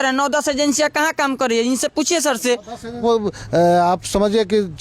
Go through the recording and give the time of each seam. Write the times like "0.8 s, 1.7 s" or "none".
3.0 s